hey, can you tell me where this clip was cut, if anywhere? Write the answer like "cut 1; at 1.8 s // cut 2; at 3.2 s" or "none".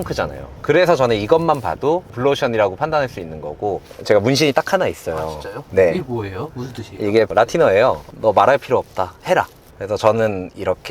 cut 1; at 3.8 s // cut 2; at 8.1 s